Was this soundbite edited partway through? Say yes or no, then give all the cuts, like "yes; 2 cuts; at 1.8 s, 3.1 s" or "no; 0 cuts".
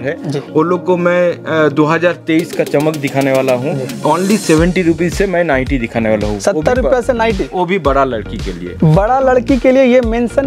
yes; 2 cuts; at 3.9 s, 8.7 s